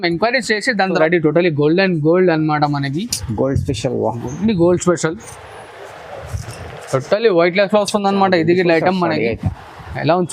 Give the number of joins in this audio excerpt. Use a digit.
1